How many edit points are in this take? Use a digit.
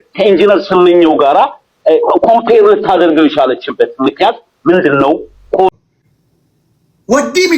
1